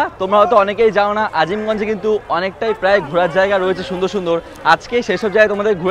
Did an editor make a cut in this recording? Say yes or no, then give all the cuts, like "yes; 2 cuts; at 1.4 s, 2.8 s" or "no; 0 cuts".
no; 0 cuts